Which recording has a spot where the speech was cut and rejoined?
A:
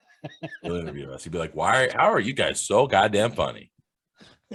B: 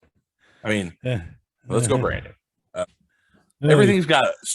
B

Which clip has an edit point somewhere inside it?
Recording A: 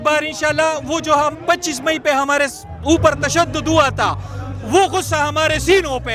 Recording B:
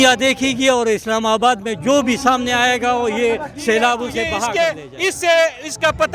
B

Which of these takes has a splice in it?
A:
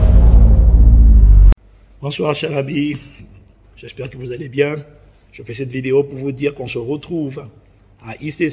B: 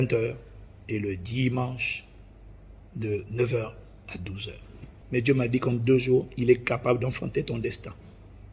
A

